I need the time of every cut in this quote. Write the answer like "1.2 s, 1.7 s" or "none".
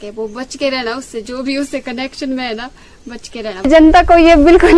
3.7 s